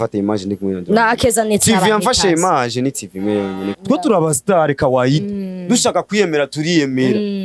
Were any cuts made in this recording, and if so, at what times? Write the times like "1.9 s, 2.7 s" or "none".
3.7 s